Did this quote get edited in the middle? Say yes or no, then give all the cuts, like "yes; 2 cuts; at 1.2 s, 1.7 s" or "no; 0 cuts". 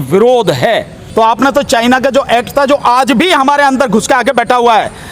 yes; 1 cut; at 1.0 s